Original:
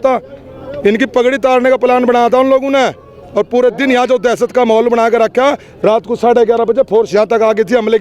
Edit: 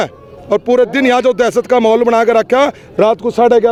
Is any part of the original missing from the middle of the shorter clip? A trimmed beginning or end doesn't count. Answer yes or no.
no